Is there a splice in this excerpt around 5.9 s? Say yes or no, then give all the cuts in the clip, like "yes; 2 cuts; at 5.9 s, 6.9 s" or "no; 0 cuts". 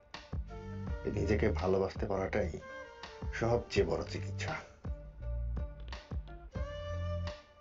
no; 1 cut; at 1.0 s